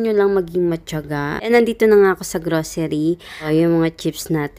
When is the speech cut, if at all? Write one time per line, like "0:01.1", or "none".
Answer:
0:01.5
0:03.5